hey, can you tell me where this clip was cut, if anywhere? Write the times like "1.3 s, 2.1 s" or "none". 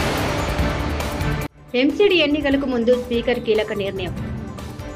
1.4 s